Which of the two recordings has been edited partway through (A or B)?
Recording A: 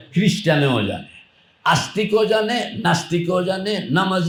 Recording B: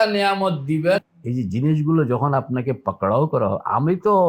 B